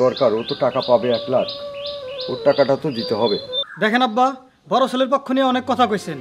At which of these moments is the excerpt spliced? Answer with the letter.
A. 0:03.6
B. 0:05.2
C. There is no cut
A